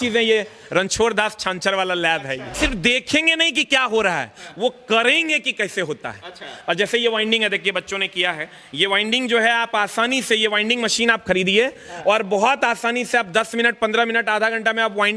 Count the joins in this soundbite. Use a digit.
1